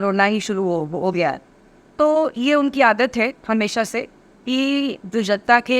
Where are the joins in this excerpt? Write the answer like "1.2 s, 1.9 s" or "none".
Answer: none